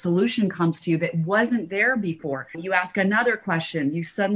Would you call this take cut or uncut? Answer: cut